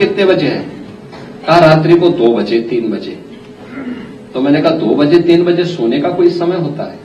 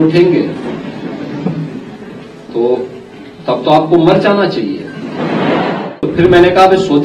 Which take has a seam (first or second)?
second